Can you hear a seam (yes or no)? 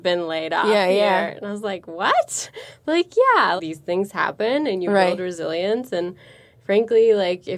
yes